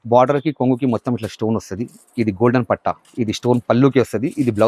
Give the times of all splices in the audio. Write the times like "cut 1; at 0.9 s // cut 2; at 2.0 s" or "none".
cut 1; at 3.0 s